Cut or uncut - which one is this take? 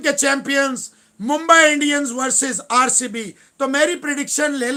uncut